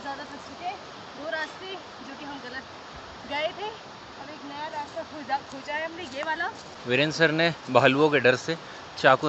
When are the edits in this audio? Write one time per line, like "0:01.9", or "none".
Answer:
none